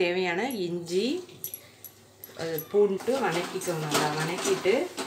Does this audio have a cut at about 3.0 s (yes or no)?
yes